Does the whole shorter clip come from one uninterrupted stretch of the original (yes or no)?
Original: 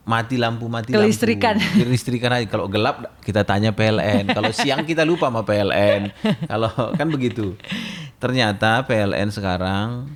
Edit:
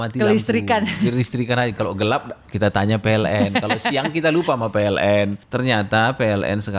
no